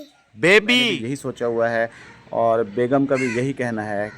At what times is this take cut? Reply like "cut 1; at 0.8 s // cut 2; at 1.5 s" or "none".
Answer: cut 1; at 1.0 s

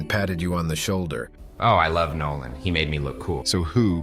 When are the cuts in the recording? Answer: cut 1; at 1.2 s

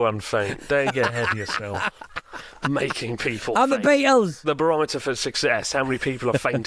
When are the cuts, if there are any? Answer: cut 1; at 4.4 s

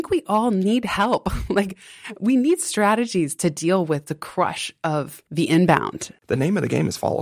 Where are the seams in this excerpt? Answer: cut 1; at 5.2 s // cut 2; at 6.1 s

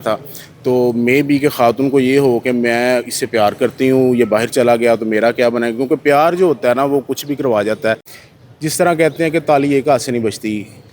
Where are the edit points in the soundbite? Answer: cut 1; at 8.1 s

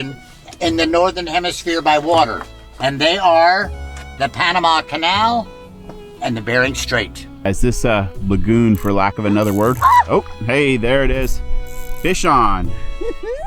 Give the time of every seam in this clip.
cut 1; at 7.4 s

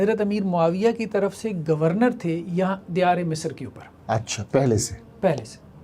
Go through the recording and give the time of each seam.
none

